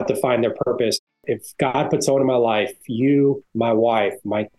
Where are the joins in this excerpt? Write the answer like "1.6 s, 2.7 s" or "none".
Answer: 1.1 s, 3.5 s